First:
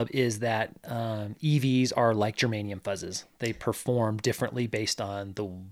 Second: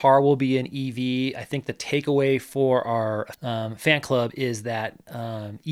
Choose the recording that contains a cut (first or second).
second